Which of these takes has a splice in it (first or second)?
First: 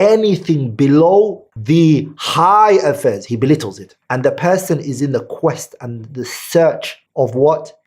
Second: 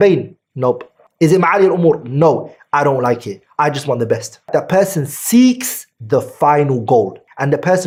first